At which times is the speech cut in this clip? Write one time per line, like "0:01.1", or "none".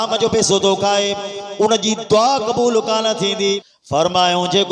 0:03.7

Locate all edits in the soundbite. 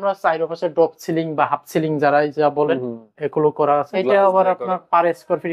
0:03.9

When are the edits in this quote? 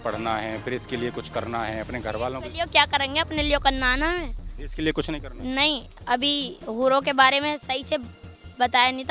0:05.9

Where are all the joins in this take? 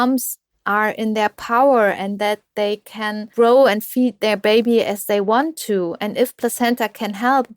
0:03.3

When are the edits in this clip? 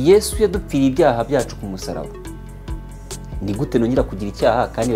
0:02.1
0:03.4

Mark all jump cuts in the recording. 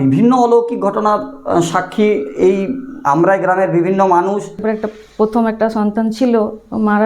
0:04.6

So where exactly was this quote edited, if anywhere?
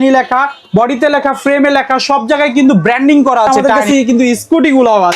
0:03.5

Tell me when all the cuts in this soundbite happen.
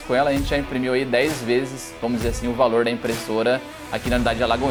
none

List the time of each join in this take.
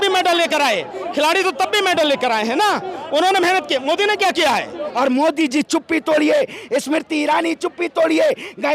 0:04.8

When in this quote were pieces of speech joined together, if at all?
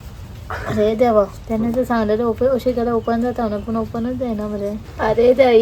0:01.4
0:04.8

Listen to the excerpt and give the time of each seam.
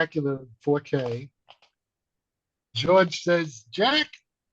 0:02.8

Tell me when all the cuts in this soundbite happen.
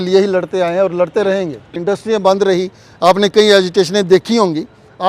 0:01.8

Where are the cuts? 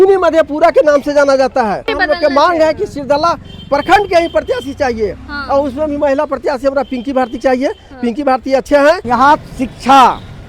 0:01.9
0:09.1

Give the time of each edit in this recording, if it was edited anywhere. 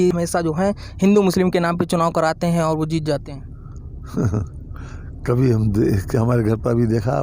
none

